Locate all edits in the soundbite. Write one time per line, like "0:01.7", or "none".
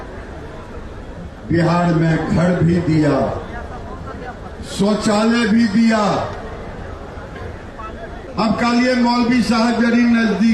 0:08.3